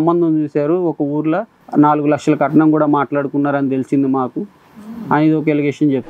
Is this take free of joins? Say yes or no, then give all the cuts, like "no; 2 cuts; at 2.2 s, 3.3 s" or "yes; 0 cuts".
yes; 0 cuts